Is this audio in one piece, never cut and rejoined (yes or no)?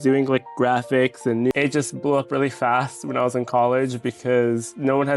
no